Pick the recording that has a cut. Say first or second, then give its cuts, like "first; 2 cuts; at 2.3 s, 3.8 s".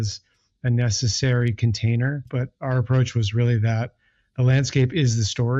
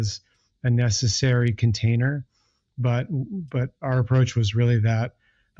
first; 1 cut; at 2.3 s